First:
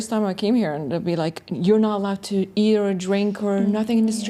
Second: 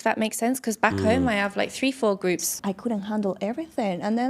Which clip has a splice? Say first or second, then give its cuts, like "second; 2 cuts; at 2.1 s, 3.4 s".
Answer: second; 1 cut; at 2.5 s